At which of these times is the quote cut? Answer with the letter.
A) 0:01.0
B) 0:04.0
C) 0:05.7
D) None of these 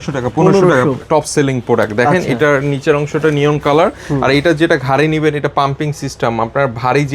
A